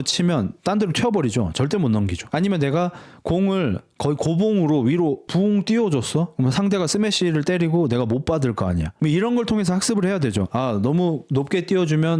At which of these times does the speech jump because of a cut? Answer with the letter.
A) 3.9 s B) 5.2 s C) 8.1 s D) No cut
D